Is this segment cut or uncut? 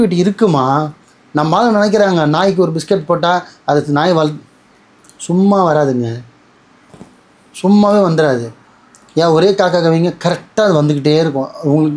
uncut